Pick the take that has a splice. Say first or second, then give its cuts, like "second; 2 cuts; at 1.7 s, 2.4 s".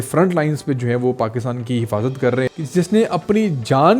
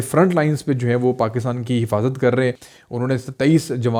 first; 1 cut; at 2.6 s